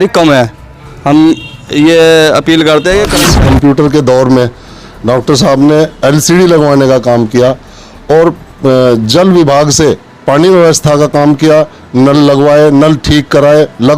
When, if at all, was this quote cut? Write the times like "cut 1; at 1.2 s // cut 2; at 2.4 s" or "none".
cut 1; at 3.2 s